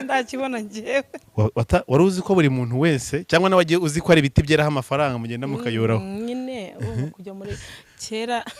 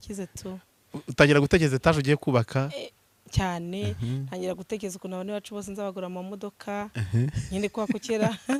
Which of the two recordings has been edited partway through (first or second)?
first